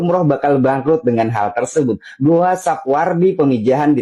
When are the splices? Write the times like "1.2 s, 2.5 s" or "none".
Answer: none